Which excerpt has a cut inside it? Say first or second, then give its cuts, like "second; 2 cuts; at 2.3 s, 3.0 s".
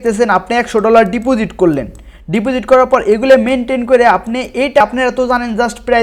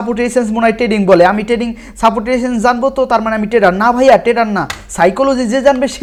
first; 1 cut; at 4.8 s